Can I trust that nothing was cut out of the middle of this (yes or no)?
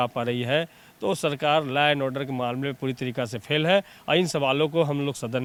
yes